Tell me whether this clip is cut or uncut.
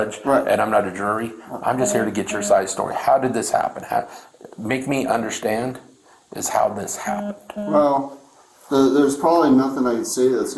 uncut